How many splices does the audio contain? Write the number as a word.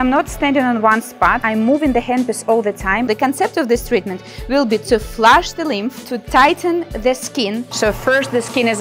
three